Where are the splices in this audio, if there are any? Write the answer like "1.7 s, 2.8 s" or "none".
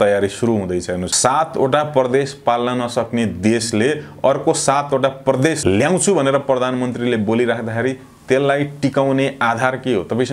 1.1 s, 5.6 s